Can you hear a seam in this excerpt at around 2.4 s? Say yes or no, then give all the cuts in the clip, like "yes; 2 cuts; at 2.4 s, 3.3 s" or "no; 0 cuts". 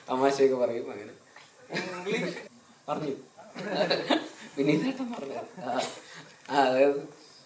yes; 1 cut; at 2.4 s